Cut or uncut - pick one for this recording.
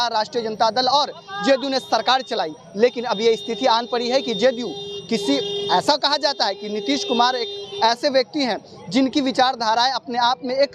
uncut